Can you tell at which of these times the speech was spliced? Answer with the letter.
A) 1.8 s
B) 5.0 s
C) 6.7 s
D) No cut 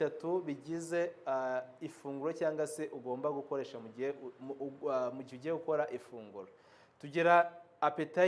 D